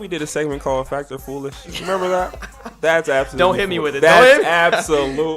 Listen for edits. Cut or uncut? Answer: uncut